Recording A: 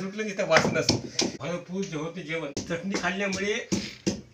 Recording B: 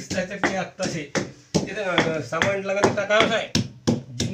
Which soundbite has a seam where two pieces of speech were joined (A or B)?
A